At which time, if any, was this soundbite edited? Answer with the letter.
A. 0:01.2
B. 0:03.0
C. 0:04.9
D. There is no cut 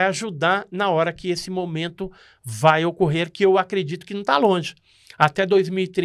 D